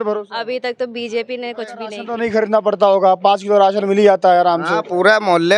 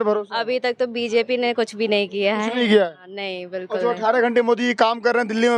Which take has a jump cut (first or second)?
first